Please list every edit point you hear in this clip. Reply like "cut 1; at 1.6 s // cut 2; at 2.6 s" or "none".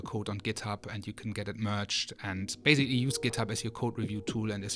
none

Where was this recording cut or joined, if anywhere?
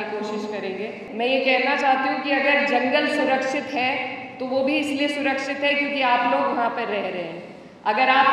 cut 1; at 1.0 s

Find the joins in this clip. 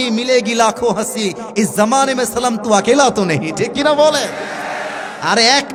none

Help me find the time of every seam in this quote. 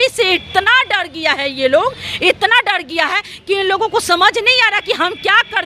none

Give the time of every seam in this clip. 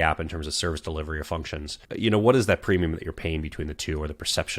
none

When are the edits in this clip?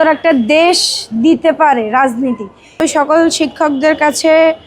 cut 1; at 2.8 s

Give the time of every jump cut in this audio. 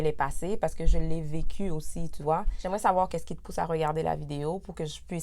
cut 1; at 2.5 s

